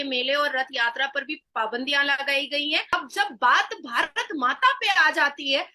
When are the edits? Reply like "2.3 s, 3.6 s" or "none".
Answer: 2.9 s